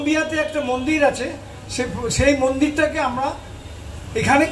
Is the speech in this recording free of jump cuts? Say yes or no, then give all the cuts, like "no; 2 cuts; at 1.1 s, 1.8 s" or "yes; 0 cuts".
yes; 0 cuts